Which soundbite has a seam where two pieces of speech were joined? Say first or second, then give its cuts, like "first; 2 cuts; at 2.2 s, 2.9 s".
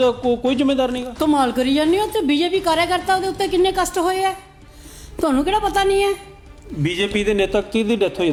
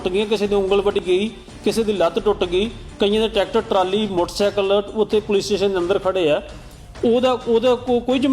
second; 1 cut; at 1.0 s